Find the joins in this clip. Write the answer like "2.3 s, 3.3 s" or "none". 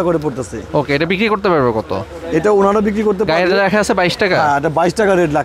none